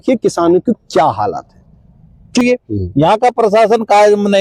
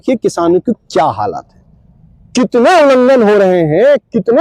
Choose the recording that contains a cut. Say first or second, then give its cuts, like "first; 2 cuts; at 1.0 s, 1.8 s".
first; 1 cut; at 2.4 s